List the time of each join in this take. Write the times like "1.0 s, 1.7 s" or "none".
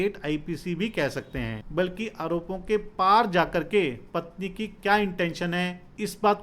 1.6 s